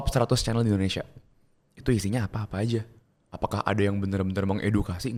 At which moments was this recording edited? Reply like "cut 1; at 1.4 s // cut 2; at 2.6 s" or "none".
none